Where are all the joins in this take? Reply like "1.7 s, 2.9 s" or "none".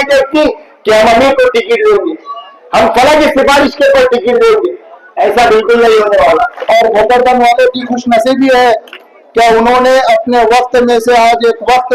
6.6 s